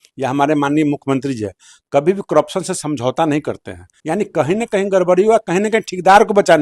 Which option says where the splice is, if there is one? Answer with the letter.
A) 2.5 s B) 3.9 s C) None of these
B